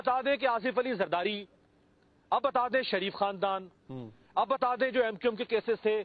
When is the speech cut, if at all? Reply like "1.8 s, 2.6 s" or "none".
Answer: none